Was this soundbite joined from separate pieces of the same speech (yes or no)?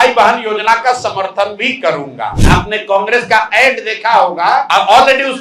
yes